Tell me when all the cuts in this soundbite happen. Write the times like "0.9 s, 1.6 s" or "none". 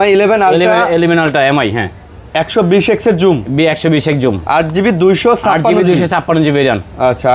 none